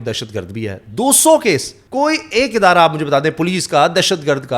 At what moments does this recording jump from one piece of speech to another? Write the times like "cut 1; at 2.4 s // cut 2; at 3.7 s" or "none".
cut 1; at 1.8 s

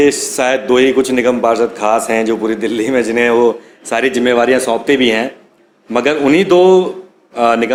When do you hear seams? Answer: none

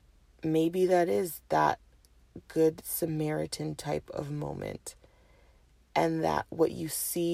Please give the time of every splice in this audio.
none

